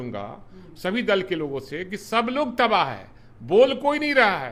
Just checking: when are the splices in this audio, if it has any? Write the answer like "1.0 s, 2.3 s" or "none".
none